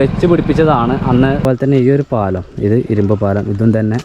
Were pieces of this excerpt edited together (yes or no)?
yes